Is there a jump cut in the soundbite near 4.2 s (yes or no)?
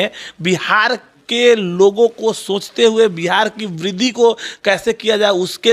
no